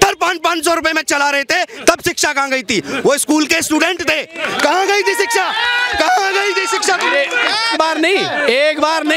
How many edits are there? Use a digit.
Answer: 1